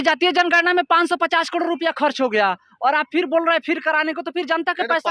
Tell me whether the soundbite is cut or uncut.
uncut